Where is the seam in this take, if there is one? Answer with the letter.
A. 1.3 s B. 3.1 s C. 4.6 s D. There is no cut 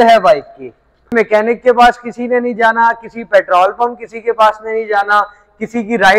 A